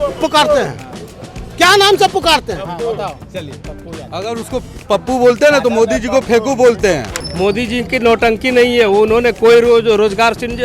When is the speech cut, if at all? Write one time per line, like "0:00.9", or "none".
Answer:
0:07.2